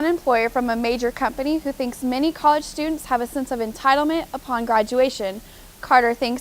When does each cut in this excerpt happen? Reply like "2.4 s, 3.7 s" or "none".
none